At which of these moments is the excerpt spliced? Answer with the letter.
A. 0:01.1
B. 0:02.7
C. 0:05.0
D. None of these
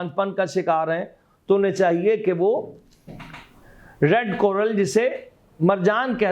D